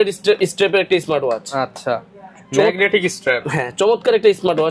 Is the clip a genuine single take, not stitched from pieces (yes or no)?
yes